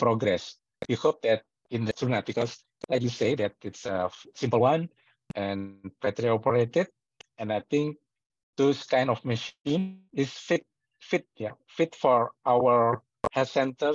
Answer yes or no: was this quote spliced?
yes